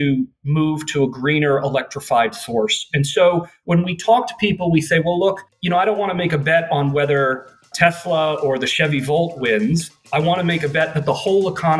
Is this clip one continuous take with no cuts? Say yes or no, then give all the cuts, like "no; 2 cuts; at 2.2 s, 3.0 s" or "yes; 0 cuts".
no; 2 cuts; at 3.5 s, 9.9 s